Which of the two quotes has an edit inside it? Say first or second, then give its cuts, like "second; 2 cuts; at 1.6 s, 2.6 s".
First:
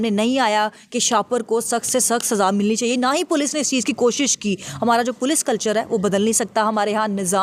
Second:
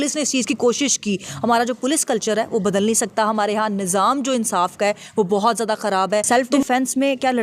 second; 1 cut; at 6.2 s